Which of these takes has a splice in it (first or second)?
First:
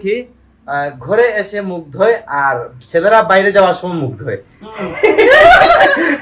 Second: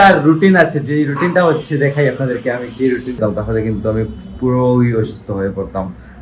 second